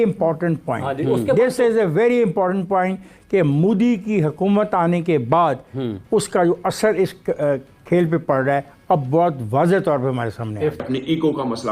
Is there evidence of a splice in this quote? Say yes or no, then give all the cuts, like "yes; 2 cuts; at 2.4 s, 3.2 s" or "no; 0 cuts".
yes; 1 cut; at 10.8 s